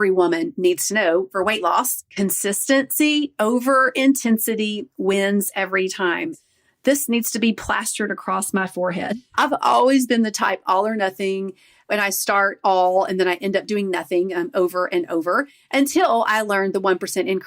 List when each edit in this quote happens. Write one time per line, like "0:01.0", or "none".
0:01.3
0:02.0
0:06.3